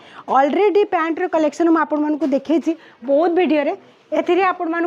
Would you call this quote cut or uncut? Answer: uncut